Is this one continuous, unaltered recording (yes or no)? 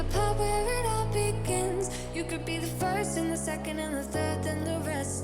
no